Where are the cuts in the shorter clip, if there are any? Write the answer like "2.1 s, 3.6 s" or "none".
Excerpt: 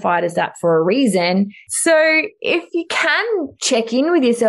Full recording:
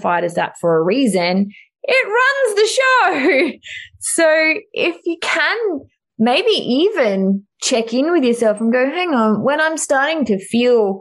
1.6 s, 3.5 s